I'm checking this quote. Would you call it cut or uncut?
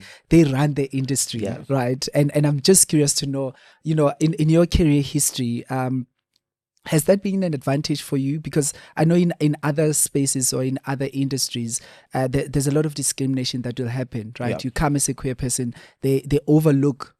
uncut